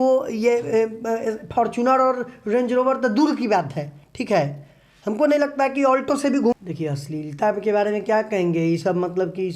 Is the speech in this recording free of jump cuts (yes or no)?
no